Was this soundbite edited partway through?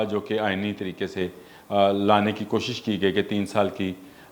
no; 0 cuts

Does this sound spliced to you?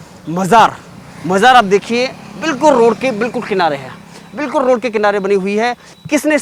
no; 0 cuts

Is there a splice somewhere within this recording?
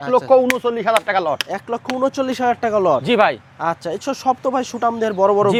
no; 0 cuts

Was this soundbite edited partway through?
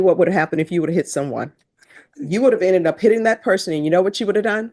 no; 0 cuts

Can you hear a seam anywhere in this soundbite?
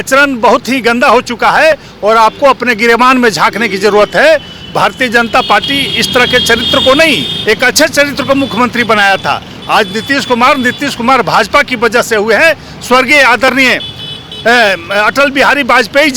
no; 0 cuts

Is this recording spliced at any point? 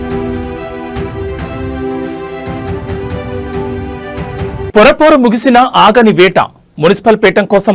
yes; 1 cut; at 4.1 s

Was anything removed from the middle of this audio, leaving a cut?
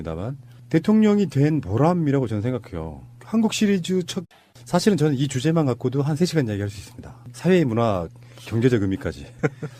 no; 0 cuts

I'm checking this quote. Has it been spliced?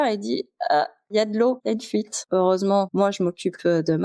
yes; 2 cuts; at 1.1 s, 2.3 s

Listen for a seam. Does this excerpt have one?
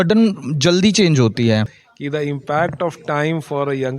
yes; 1 cut; at 1.8 s

